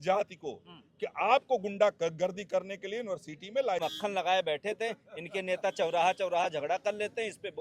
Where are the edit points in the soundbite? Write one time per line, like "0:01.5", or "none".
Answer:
0:03.8

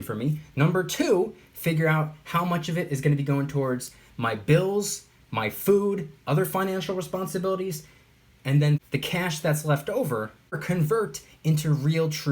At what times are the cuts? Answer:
0:08.9
0:10.6

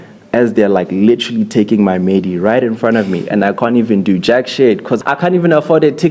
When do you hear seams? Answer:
0:05.0

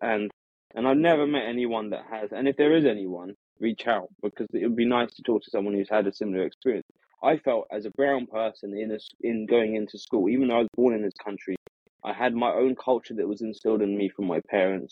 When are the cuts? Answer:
none

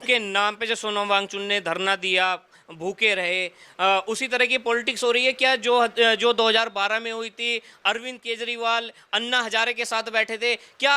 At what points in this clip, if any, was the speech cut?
none

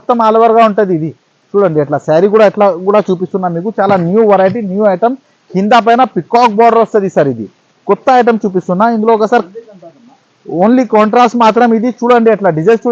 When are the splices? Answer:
none

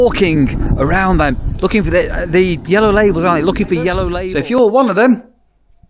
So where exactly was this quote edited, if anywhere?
0:04.1

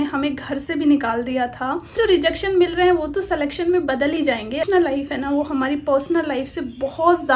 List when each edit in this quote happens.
0:01.9
0:04.6

